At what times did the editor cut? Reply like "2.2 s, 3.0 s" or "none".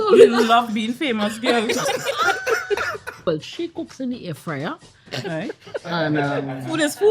3.2 s